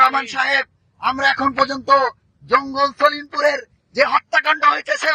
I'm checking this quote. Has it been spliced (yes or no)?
no